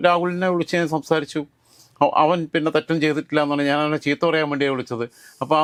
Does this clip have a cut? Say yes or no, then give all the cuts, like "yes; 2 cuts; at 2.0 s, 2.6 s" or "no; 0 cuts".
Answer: no; 0 cuts